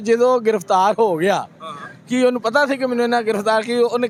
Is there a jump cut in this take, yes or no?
no